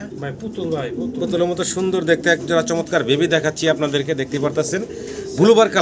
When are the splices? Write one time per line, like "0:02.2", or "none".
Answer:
none